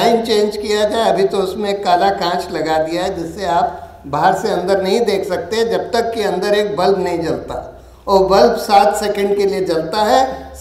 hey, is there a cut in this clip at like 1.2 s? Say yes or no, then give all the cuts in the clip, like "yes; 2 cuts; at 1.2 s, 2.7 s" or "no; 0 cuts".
no; 0 cuts